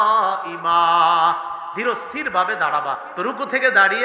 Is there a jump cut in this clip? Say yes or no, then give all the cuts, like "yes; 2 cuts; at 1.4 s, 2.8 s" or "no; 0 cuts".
yes; 1 cut; at 3.1 s